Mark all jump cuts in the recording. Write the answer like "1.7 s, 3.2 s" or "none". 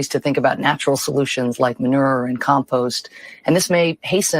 1.7 s